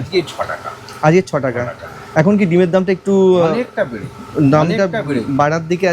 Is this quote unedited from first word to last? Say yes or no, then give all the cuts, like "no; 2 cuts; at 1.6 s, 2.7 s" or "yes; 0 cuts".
yes; 0 cuts